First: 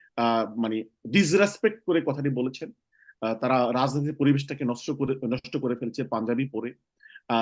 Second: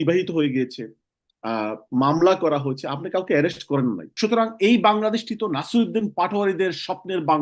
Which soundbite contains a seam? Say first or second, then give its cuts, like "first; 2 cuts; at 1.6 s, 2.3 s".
second; 1 cut; at 4.1 s